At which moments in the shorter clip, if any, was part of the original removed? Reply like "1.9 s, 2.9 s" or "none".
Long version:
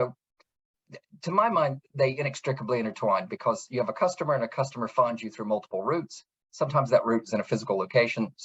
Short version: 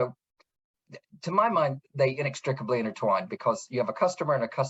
none